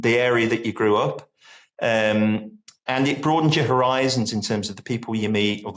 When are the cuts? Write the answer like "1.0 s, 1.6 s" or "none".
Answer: none